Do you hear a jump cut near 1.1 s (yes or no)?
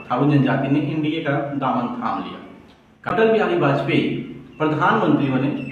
no